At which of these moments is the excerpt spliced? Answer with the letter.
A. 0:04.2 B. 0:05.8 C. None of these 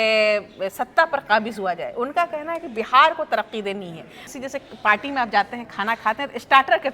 A